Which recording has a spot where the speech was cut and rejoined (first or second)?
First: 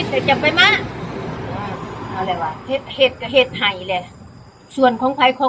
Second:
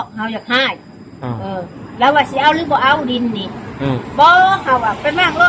first